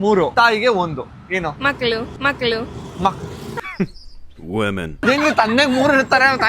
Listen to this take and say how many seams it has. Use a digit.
1